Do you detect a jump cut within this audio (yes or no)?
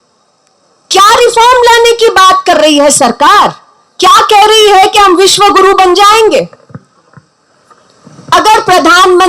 no